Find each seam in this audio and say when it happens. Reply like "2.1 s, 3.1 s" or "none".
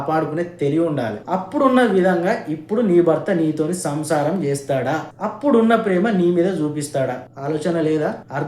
1.2 s